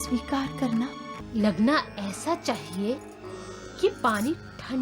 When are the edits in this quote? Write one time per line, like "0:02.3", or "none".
0:01.2